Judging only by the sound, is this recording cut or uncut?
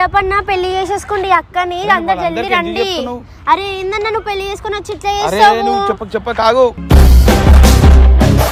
uncut